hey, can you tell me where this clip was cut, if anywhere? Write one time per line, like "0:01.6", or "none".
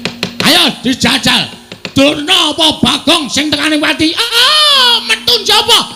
none